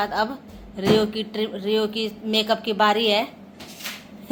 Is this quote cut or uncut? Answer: uncut